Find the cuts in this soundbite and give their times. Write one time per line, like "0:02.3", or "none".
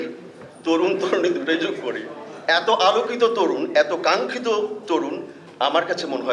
none